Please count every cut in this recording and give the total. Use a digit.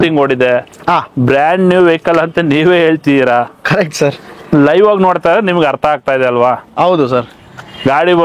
0